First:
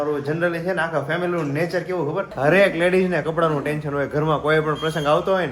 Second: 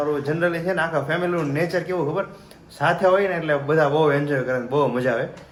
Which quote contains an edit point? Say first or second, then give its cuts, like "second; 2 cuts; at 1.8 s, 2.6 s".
first; 1 cut; at 2.3 s